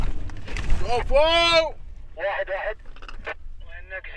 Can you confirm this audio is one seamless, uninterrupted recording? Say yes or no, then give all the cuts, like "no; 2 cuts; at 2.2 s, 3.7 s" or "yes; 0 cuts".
yes; 0 cuts